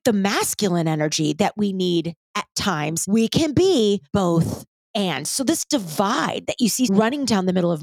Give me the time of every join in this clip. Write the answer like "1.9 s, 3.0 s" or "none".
2.9 s, 4.0 s, 6.9 s

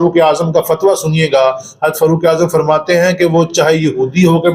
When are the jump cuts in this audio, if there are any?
none

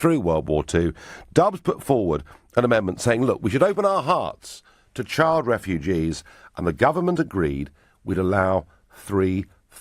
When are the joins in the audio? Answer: 3.8 s

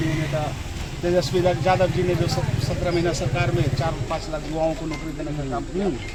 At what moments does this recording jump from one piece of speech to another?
none

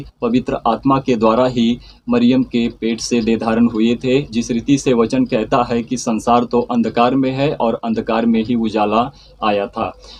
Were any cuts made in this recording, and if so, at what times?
none

